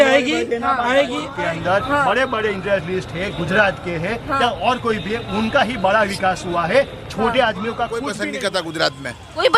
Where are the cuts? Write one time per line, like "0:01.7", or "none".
0:01.2
0:08.1